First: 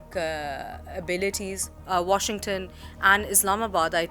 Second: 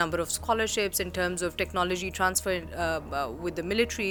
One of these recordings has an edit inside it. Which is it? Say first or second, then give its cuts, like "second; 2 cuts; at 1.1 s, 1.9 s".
first; 1 cut; at 1.7 s